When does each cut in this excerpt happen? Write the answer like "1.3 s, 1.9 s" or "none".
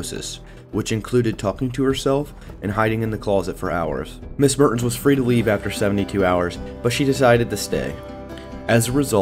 2.5 s